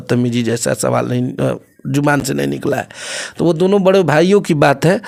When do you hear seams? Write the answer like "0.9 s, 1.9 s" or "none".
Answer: none